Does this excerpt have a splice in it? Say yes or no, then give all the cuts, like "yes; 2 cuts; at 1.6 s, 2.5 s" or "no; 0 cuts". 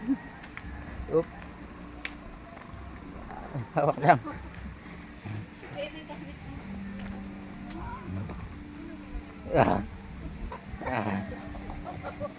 no; 0 cuts